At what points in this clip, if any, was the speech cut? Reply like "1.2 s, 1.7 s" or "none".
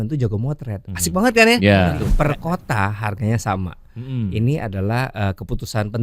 2.1 s